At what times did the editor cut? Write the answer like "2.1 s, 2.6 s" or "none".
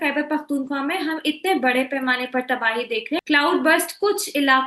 3.2 s